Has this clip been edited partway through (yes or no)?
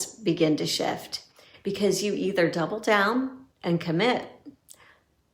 no